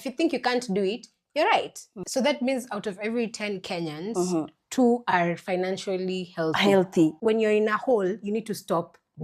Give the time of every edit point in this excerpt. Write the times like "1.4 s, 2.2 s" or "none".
2.0 s, 7.2 s